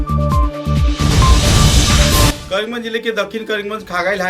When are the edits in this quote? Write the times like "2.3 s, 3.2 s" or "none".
2.3 s

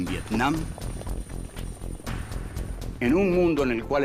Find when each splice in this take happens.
2.8 s

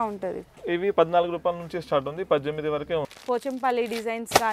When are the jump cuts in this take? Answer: 3.1 s

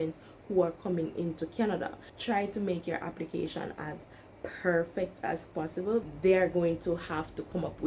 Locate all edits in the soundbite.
2.1 s, 6.1 s

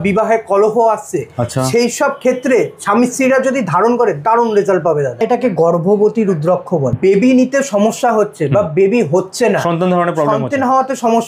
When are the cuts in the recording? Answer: 5.2 s, 7.0 s

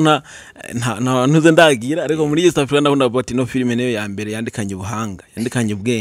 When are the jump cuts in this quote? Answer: none

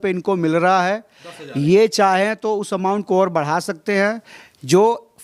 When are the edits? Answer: none

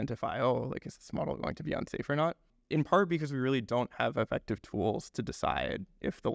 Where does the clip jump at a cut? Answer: 2.5 s

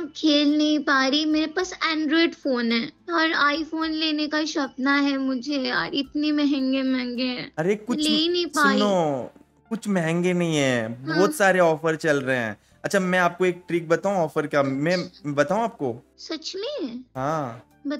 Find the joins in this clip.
3.0 s, 16.1 s

